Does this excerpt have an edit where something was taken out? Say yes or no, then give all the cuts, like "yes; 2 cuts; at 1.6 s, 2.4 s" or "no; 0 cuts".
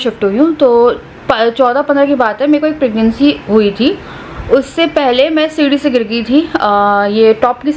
no; 0 cuts